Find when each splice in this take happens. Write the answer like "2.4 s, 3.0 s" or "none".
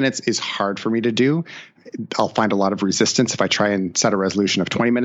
1.7 s